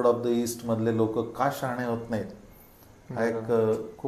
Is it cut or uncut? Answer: uncut